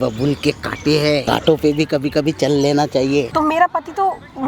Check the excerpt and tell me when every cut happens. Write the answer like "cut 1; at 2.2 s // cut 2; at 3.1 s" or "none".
cut 1; at 1.2 s // cut 2; at 3.3 s